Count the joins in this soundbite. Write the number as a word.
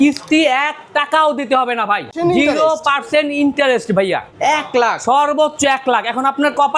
two